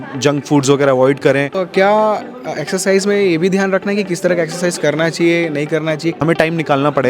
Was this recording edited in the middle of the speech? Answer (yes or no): yes